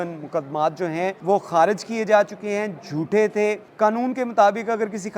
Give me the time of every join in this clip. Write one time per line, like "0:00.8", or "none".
0:01.2
0:03.6